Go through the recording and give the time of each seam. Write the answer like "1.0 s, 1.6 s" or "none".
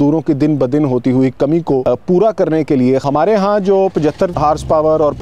1.8 s, 3.0 s, 4.3 s